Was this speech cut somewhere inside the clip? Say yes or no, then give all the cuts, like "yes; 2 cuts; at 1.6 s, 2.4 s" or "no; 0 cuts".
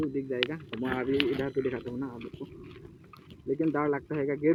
no; 0 cuts